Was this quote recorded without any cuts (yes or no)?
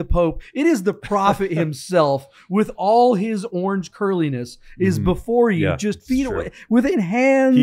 yes